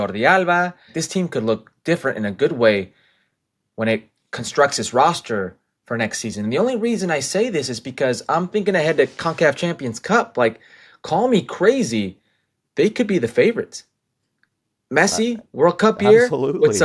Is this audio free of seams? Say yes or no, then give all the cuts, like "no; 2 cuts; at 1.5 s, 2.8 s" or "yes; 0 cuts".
no; 1 cut; at 1.0 s